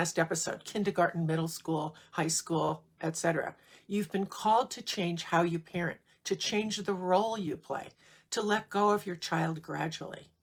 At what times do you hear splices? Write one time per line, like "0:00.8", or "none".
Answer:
none

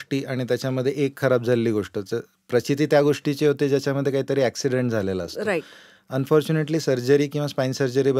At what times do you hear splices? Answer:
none

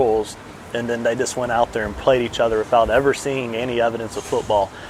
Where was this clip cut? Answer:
none

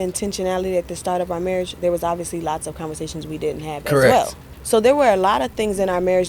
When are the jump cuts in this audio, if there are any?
0:04.4

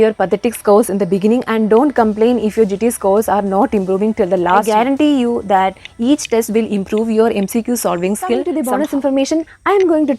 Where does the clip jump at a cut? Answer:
0:04.7
0:08.5

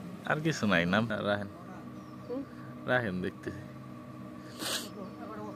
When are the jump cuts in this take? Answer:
0:01.1

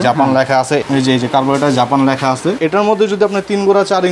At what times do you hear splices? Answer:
0:02.6

